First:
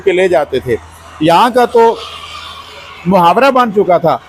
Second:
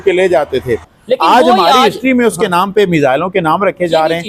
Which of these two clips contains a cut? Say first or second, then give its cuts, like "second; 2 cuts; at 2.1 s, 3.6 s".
second; 1 cut; at 0.9 s